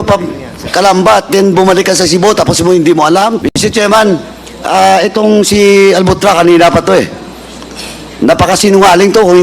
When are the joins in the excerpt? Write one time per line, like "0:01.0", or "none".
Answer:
0:03.4